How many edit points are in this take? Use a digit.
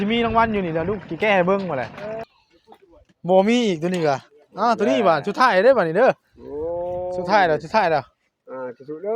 1